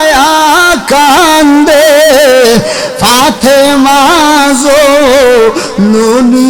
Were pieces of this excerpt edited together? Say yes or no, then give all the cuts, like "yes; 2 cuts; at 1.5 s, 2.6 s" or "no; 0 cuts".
no; 0 cuts